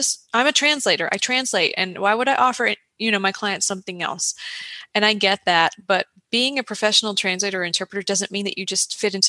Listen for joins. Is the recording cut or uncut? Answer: uncut